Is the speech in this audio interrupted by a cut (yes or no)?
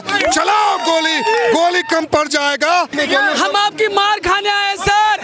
yes